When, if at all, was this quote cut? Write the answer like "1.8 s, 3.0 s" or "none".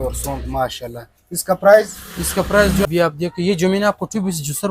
2.9 s